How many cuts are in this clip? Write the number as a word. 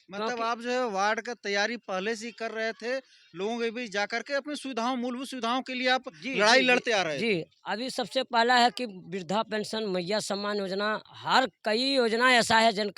zero